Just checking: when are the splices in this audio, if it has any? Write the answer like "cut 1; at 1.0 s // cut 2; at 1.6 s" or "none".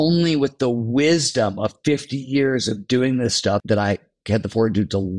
cut 1; at 3.6 s

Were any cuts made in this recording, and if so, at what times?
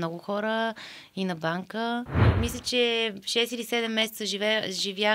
cut 1; at 2.2 s

